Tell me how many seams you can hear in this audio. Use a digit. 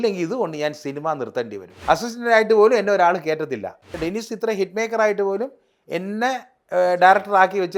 2